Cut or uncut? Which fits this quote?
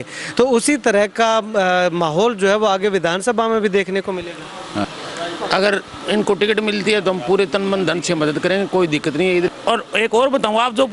cut